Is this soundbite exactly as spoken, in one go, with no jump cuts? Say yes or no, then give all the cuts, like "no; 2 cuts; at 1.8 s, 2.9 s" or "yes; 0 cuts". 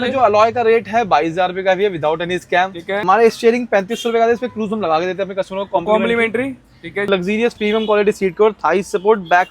no; 2 cuts; at 3.0 s, 7.0 s